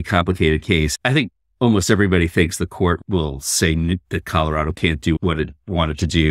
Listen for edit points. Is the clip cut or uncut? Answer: cut